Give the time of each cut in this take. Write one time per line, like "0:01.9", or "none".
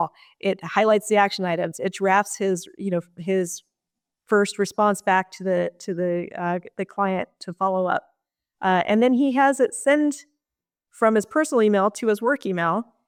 none